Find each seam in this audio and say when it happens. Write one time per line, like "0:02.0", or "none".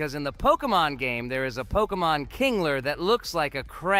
none